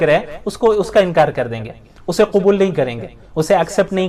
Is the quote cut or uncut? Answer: uncut